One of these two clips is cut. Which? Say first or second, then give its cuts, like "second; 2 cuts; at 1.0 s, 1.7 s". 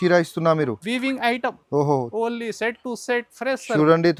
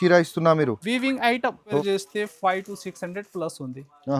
second; 1 cut; at 1.8 s